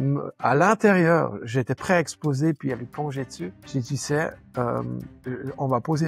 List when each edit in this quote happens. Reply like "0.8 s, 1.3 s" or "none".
3.6 s